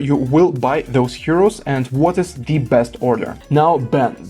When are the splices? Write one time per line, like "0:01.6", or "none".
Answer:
0:03.3